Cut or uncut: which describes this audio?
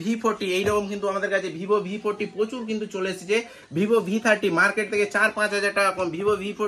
uncut